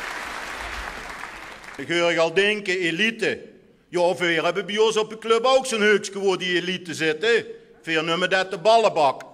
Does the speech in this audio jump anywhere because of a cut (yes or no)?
no